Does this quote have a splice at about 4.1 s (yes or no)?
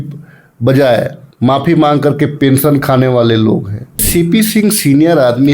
yes